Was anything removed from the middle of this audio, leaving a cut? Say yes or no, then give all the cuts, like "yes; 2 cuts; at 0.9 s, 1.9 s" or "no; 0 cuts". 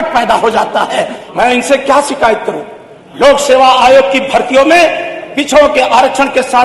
yes; 1 cut; at 1.2 s